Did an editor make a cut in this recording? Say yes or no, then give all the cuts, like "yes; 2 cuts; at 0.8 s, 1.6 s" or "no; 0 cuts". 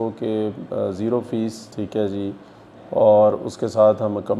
no; 0 cuts